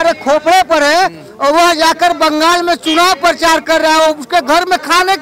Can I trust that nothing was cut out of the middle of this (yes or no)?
yes